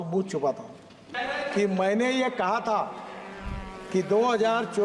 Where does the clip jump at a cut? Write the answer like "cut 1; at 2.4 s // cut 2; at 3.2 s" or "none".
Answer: cut 1; at 1.1 s